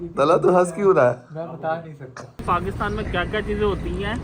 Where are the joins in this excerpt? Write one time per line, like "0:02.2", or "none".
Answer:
0:02.4